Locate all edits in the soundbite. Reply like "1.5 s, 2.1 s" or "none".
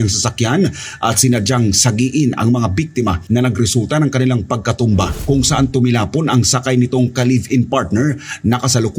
5.1 s